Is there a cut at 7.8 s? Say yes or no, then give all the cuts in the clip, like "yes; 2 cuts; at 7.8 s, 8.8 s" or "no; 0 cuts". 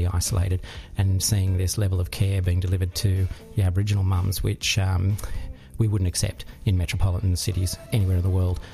yes; 1 cut; at 7.8 s